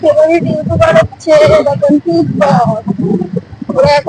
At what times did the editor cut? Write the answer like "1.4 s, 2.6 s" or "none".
none